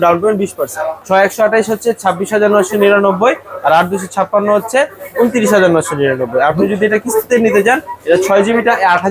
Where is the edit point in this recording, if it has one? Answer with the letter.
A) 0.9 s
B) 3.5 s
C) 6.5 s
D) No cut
A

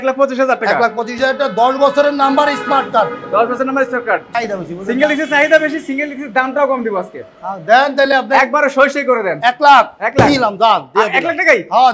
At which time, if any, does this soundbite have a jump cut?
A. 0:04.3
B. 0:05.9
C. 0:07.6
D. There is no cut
A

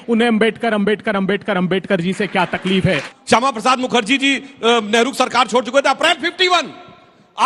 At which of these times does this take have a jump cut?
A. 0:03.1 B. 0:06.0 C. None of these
A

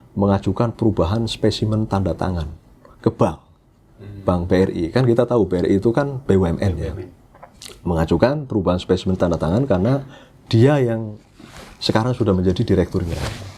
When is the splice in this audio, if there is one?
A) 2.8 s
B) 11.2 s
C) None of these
C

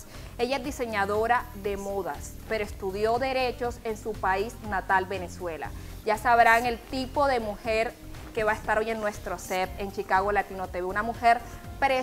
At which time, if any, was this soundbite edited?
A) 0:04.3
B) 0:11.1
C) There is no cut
A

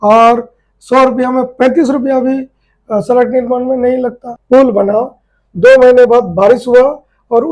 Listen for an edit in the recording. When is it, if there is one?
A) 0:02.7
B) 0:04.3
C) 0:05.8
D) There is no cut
B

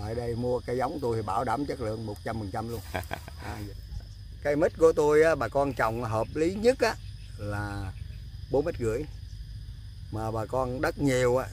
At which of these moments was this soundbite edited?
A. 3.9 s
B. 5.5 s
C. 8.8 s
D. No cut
A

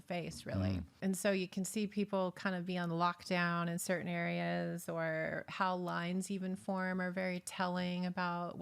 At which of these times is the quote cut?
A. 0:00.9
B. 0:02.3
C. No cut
A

